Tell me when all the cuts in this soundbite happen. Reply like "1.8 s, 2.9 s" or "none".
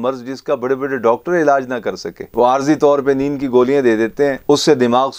none